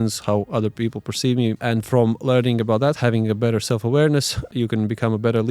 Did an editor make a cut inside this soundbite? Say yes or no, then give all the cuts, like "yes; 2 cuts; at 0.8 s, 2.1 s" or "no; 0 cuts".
yes; 2 cuts; at 1.6 s, 4.5 s